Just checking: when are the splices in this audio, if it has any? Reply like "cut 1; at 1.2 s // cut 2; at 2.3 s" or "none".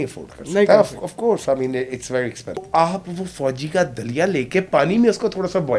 cut 1; at 2.7 s